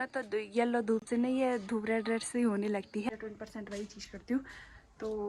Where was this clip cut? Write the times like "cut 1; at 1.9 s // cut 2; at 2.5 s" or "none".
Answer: cut 1; at 3.1 s